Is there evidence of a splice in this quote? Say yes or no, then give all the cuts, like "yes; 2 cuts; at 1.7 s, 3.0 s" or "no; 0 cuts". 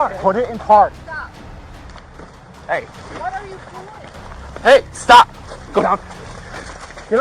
no; 0 cuts